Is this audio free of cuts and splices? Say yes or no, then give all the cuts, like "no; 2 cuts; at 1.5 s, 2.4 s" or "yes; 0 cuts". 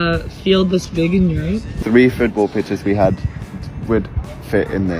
no; 1 cut; at 1.8 s